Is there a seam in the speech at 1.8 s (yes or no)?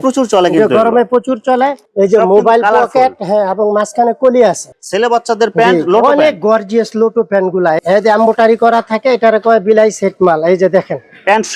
yes